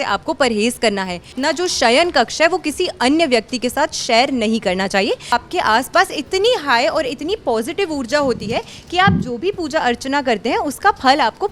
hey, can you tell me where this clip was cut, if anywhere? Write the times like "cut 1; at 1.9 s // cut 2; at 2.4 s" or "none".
cut 1; at 1.3 s // cut 2; at 5.3 s